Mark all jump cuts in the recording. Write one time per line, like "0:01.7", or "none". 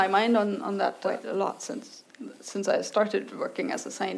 0:01.0